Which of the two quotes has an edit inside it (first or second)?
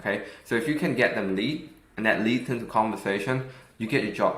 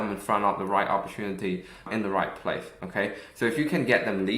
second